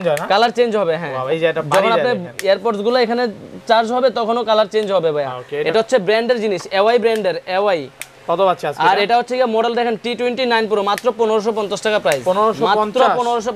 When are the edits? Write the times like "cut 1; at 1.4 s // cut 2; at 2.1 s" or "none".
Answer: none